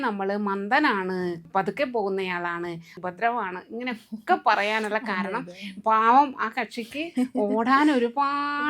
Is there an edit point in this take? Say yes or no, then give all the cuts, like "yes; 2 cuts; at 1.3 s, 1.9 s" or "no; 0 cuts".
yes; 2 cuts; at 1.4 s, 3.0 s